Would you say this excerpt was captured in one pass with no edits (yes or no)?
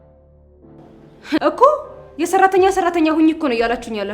no